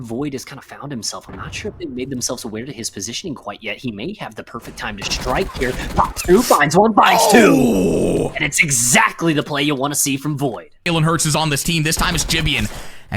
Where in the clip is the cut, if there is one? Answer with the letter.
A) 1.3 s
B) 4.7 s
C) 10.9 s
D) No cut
C